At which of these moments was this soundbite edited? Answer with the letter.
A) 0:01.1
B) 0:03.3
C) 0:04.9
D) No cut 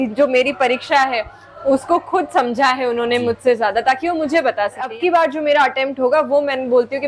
C